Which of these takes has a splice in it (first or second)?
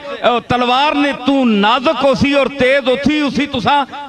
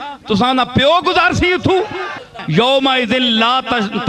second